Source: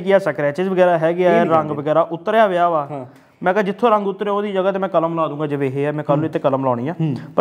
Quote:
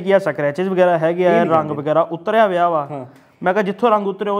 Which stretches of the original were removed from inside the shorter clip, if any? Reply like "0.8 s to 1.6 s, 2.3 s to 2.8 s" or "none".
none